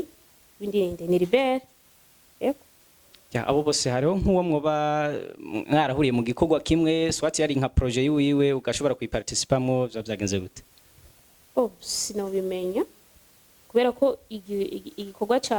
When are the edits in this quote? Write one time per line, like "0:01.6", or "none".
none